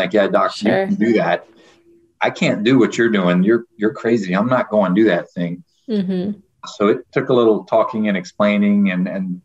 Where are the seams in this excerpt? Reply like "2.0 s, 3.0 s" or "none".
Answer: 7.1 s